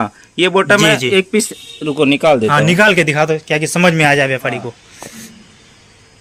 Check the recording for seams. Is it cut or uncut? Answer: uncut